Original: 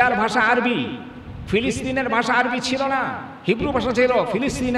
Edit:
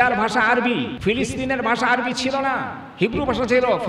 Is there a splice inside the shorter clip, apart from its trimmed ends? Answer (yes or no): yes